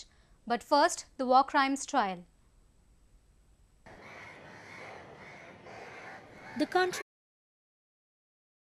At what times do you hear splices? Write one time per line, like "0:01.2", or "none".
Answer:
none